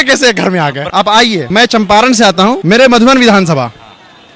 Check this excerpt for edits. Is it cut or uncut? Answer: cut